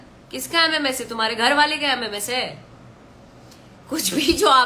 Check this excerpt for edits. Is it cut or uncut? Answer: uncut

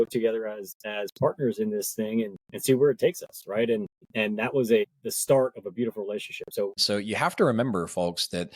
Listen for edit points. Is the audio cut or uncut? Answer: cut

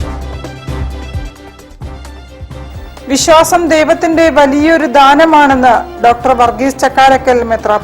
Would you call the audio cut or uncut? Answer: cut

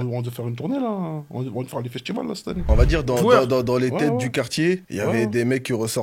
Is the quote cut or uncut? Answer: cut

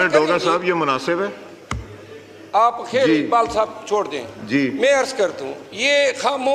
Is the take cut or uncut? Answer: uncut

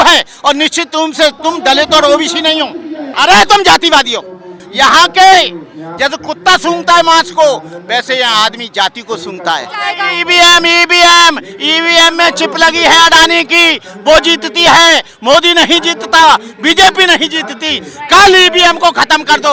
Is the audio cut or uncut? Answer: cut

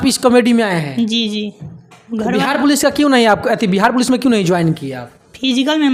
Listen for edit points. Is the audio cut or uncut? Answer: uncut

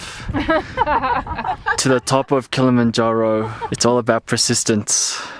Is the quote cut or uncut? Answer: cut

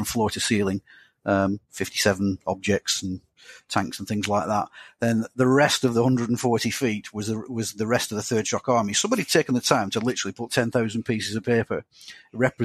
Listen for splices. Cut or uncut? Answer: uncut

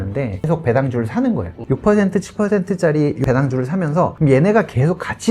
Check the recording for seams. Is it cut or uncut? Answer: cut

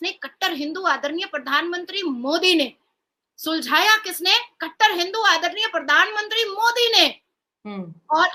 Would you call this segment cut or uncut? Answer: uncut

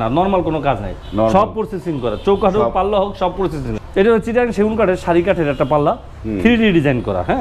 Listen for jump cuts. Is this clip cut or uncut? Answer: cut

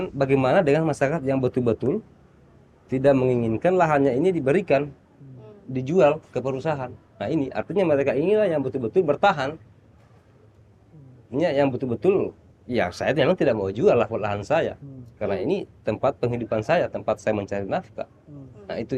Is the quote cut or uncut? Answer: uncut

